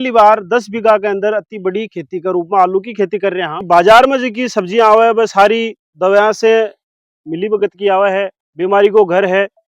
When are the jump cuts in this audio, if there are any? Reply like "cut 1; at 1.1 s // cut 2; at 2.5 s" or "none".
cut 1; at 3.6 s // cut 2; at 8.3 s